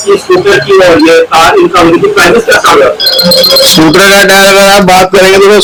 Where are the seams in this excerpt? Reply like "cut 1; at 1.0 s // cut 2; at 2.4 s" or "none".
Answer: none